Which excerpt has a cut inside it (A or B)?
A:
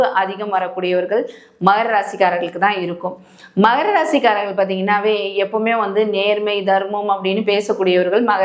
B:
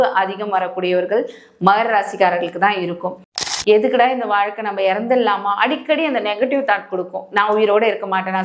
B